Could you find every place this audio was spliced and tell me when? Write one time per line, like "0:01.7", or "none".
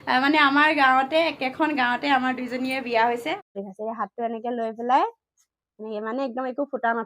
0:03.6

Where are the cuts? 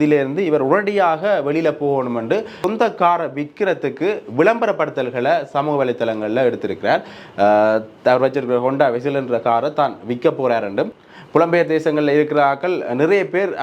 0:02.6
0:11.0

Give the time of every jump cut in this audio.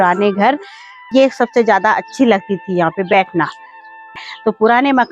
0:01.1
0:04.1

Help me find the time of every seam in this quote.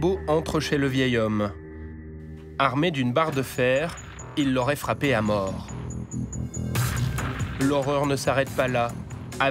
none

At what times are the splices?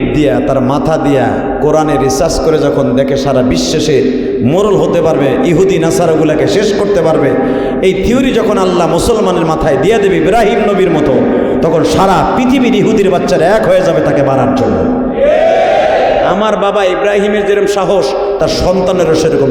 0:16.3

